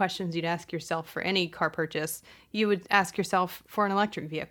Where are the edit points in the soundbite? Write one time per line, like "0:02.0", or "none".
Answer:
0:03.6